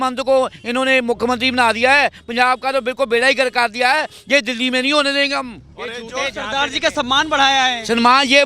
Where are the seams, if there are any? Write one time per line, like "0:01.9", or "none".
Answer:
none